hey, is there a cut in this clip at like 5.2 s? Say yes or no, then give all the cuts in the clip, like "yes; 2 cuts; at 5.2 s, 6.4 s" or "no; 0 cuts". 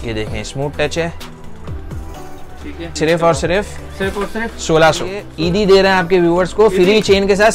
yes; 2 cuts; at 3.0 s, 5.2 s